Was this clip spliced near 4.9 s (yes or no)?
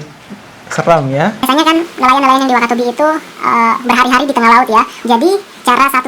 yes